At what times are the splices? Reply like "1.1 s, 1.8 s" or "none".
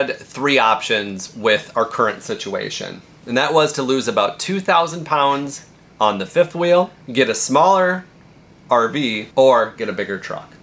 7.0 s, 9.2 s